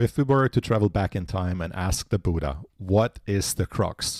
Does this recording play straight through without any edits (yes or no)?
yes